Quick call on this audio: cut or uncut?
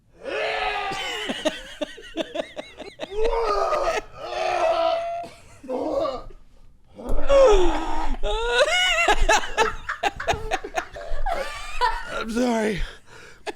cut